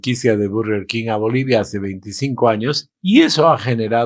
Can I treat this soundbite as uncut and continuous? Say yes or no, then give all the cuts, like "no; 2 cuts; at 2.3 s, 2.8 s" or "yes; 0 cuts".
yes; 0 cuts